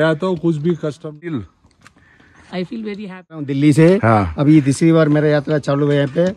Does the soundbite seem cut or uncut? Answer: cut